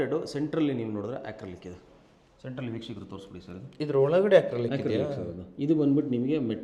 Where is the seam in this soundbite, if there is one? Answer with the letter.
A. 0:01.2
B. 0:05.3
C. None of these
C